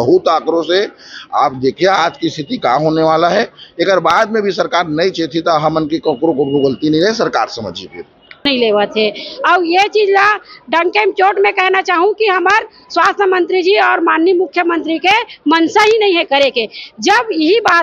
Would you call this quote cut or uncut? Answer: cut